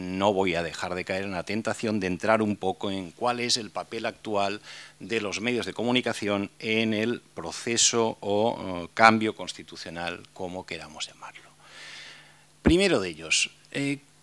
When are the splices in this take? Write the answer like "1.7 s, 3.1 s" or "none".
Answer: none